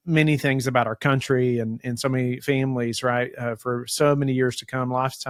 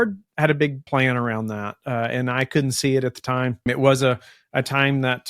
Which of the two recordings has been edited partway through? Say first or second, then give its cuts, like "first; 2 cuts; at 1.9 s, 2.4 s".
second; 2 cuts; at 0.8 s, 3.7 s